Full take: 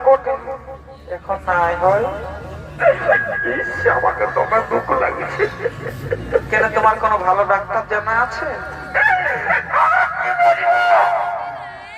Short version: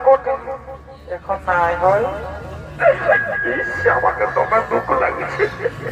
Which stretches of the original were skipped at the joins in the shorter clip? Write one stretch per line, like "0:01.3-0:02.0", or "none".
none